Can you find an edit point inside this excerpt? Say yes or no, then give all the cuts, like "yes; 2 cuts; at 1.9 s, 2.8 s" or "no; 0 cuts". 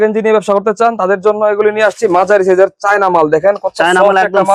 no; 0 cuts